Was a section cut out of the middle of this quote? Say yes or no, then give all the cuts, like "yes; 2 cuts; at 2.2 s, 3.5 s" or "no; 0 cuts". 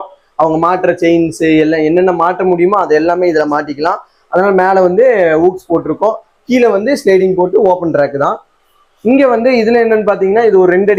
no; 0 cuts